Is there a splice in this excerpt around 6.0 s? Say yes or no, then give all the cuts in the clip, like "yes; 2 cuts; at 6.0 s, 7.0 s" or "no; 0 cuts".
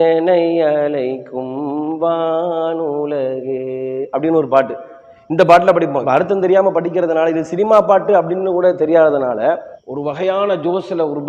yes; 1 cut; at 6.0 s